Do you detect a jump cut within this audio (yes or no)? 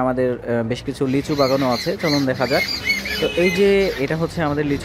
no